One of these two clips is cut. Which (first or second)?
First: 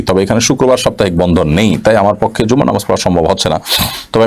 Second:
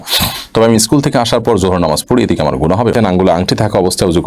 second